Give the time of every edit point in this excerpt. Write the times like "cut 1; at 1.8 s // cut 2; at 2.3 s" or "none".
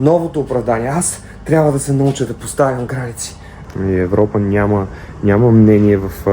cut 1; at 3.5 s